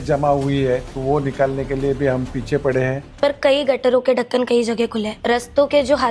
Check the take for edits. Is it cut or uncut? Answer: cut